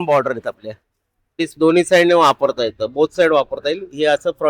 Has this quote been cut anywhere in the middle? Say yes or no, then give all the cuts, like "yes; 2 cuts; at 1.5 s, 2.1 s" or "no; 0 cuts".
yes; 1 cut; at 1.5 s